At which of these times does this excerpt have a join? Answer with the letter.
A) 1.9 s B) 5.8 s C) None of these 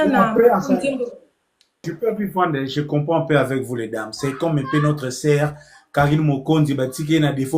A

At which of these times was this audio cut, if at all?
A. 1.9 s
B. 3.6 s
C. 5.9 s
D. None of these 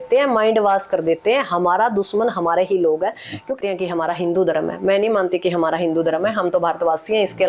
B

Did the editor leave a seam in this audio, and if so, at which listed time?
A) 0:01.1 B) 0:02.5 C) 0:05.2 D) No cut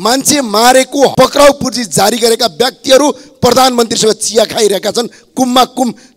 A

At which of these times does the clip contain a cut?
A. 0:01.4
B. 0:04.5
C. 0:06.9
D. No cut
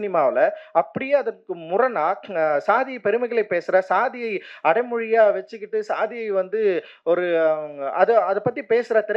D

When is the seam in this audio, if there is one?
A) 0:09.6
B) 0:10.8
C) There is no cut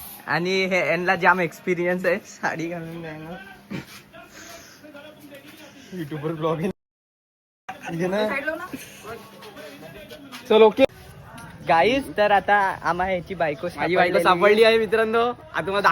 B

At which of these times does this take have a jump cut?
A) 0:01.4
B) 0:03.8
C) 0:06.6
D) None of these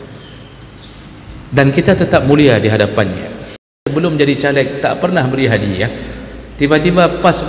B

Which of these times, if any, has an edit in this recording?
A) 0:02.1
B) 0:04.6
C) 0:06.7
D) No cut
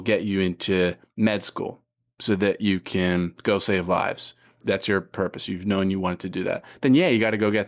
B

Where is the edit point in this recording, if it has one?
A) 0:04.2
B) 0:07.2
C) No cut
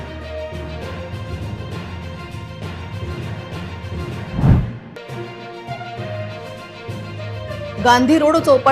A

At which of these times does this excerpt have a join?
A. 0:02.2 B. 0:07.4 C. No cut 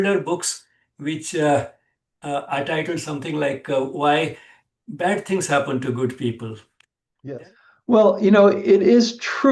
B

